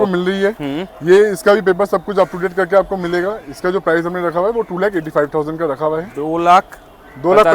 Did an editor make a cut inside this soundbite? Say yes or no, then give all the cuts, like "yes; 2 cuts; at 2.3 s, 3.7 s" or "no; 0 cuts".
no; 0 cuts